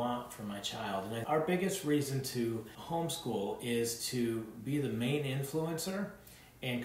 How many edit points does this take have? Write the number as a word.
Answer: two